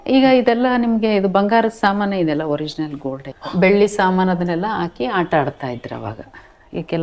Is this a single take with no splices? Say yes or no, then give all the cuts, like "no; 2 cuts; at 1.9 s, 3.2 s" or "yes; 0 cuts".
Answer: no; 1 cut; at 3.3 s